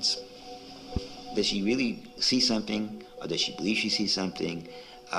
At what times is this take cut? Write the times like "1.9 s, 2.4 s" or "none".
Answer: none